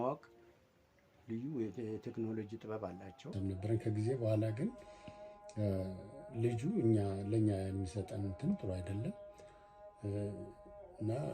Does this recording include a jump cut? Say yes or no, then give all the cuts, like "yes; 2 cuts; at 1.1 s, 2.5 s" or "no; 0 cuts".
yes; 1 cut; at 3.3 s